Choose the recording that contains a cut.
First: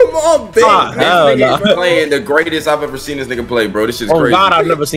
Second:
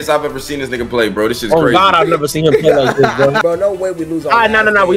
second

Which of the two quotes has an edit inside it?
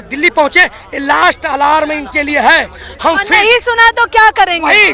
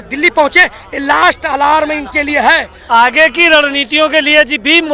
second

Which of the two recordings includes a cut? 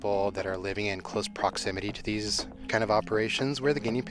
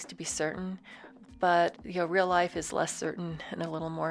first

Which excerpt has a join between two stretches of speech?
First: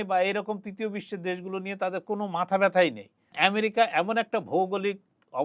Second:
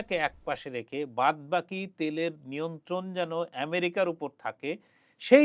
first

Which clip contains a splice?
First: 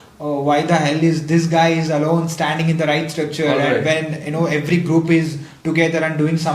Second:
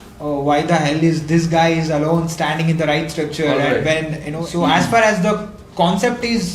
second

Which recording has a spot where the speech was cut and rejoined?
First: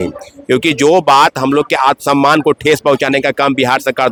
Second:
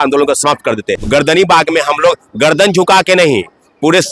second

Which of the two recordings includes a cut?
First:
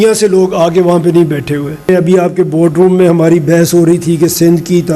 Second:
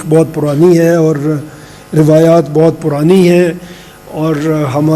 first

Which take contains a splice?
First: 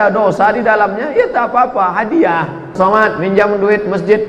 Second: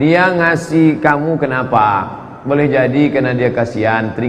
first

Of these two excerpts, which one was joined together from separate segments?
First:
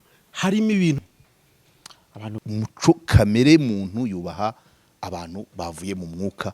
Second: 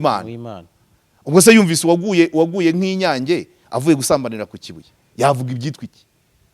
first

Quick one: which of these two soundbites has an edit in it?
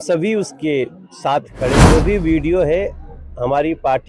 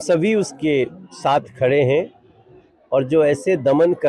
first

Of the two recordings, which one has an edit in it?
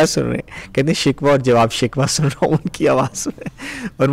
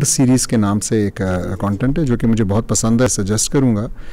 second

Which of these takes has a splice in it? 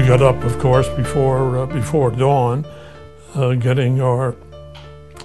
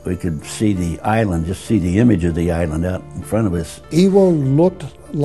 second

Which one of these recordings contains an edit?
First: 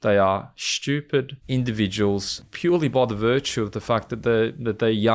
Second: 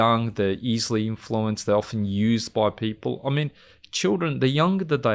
first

